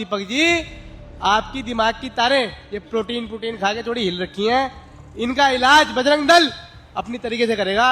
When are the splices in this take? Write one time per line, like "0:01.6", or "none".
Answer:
none